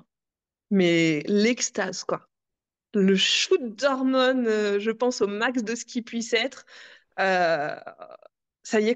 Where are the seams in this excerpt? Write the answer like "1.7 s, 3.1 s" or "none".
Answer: none